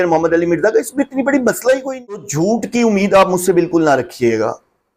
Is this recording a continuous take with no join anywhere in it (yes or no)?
no